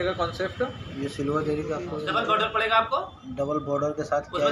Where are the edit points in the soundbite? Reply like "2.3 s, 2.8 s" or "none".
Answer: 2.0 s